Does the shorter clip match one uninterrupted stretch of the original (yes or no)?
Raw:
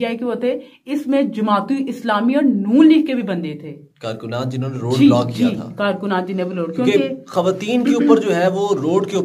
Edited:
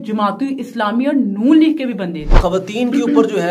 no